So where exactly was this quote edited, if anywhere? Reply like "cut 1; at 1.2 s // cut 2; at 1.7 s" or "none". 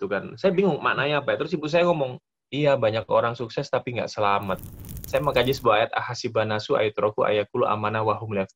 cut 1; at 4.9 s